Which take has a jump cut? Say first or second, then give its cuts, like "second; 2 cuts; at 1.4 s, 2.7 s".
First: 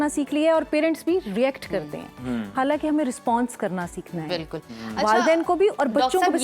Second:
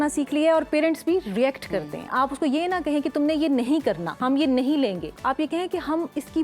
second; 3 cuts; at 2.1 s, 4.1 s, 5.1 s